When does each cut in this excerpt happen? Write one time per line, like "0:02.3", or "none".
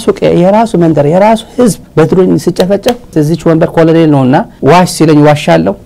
none